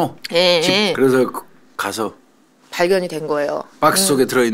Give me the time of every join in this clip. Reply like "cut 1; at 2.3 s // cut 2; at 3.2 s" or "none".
cut 1; at 0.9 s